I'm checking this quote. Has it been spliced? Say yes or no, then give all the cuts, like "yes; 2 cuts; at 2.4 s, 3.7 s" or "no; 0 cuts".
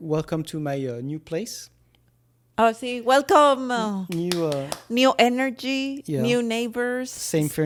no; 0 cuts